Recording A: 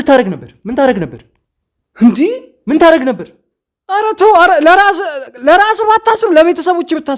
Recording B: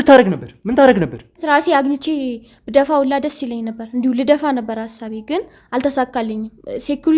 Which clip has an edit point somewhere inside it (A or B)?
B